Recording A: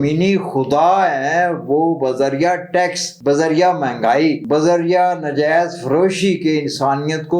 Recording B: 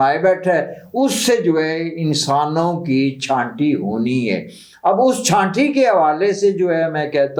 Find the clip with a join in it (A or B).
A